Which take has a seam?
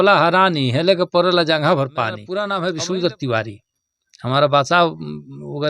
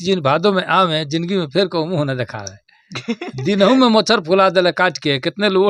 first; 1 cut; at 2.3 s

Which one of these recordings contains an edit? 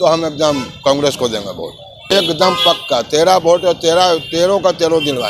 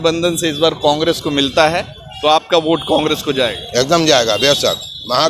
first; 1 cut; at 2.1 s

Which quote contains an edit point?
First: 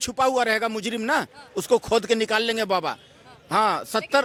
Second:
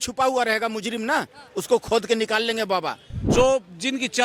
second; 1 cut; at 3.3 s

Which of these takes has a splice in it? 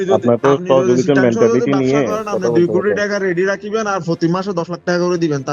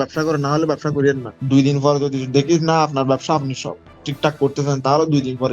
second; 1 cut; at 1.3 s

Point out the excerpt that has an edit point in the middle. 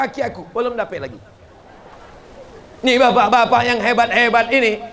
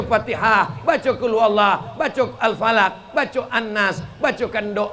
first; 1 cut; at 2.0 s

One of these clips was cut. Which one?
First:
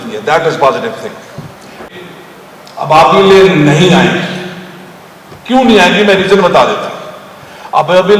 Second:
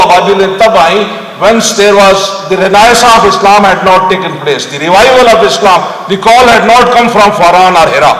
first; 1 cut; at 1.8 s

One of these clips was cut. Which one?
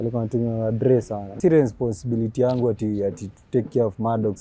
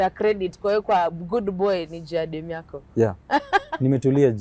first; 1 cut; at 1.4 s

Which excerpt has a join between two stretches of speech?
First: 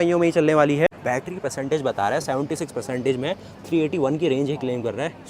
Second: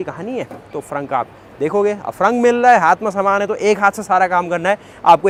first; 1 cut; at 1.0 s

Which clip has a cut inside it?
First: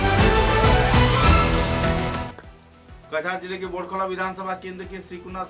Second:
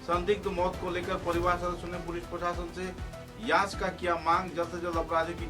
first; 1 cut; at 2.2 s

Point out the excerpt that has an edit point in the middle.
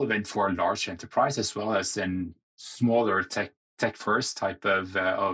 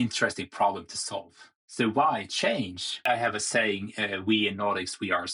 second; 1 cut; at 2.9 s

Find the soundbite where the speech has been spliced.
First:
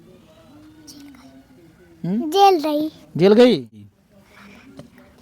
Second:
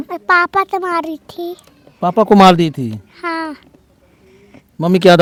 first; 1 cut; at 3.9 s

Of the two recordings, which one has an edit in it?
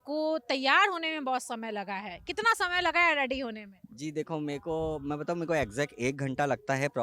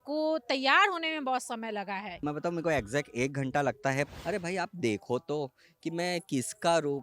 second; 2 cuts; at 2.2 s, 4.1 s

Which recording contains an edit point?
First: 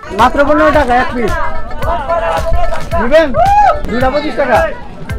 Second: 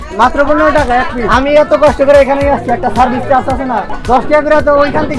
second; 2 cuts; at 1.2 s, 3.9 s

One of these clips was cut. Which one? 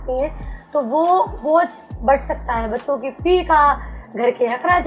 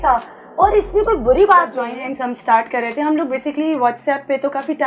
second; 1 cut; at 1.8 s

